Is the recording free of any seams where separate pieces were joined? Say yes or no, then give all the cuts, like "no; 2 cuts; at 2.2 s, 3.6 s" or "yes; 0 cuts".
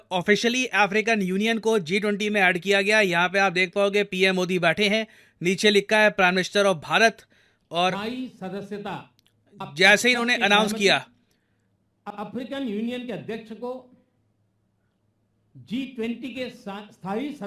yes; 0 cuts